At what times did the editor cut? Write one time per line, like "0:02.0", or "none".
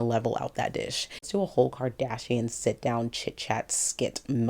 0:01.2